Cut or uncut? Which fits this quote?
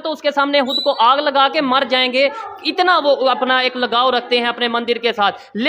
uncut